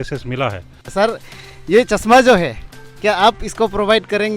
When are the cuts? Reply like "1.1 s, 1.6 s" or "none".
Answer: 0.9 s